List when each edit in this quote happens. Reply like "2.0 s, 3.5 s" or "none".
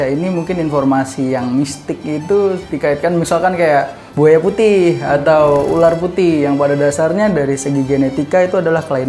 4.0 s

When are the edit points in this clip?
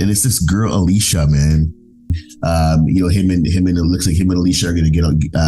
2.2 s

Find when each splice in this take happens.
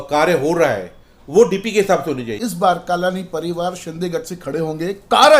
2.3 s

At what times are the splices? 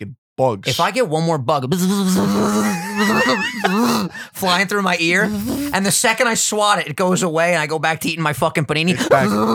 none

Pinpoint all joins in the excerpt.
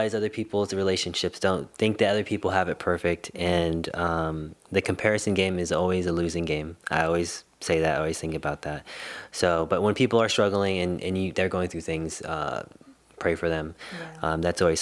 none

